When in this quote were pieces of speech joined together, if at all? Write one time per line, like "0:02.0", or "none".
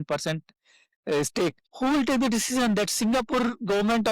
0:01.6